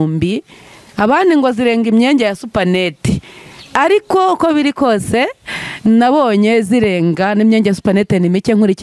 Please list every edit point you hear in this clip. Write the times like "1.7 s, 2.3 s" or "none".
none